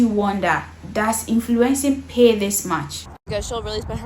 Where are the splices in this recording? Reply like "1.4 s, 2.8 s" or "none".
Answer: 2.9 s